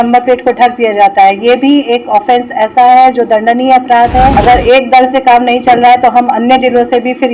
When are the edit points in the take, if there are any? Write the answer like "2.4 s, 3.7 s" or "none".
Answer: 4.3 s